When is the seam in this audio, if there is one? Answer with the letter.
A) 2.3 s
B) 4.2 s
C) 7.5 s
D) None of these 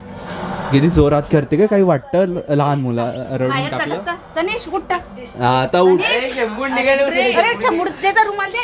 D